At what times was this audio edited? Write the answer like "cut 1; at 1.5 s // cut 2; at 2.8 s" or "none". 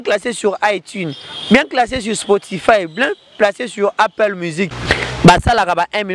cut 1; at 4.8 s